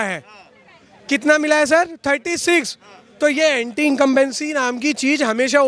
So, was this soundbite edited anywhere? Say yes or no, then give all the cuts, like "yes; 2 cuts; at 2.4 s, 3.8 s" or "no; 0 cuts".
no; 0 cuts